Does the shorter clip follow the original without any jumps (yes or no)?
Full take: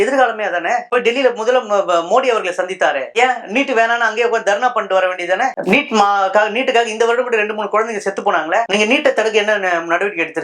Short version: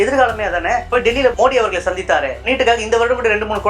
no